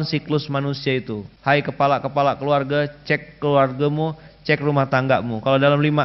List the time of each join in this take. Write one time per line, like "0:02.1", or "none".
0:01.2